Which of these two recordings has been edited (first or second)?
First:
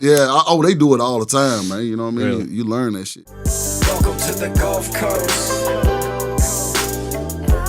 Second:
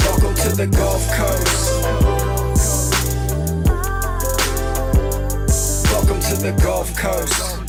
first